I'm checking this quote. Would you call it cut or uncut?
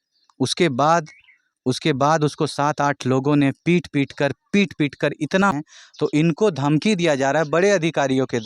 cut